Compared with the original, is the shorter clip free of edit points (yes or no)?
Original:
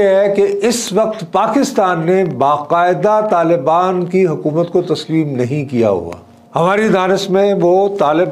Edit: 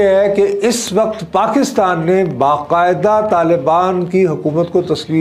yes